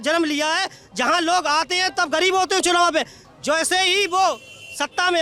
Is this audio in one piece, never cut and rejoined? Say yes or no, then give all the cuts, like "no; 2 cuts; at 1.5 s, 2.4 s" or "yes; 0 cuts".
yes; 0 cuts